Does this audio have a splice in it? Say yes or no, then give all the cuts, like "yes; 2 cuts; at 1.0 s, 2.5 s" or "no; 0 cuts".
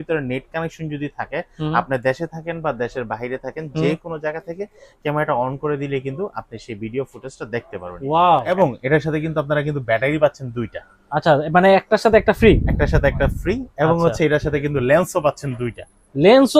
yes; 1 cut; at 8.6 s